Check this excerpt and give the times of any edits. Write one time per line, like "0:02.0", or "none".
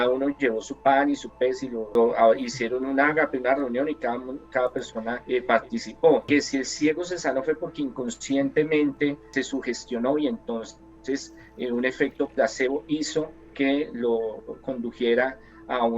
0:01.8
0:05.2
0:06.2
0:09.2